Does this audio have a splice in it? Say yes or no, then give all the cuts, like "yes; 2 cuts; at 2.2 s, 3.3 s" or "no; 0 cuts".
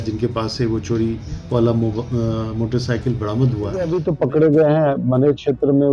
yes; 1 cut; at 4.0 s